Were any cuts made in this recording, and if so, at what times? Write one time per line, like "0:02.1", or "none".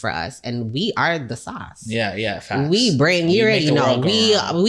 none